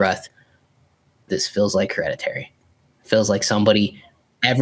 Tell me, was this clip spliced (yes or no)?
no